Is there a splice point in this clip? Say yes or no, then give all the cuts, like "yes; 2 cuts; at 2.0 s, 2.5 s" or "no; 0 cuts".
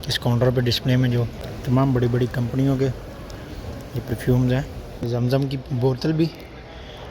yes; 2 cuts; at 1.5 s, 5.0 s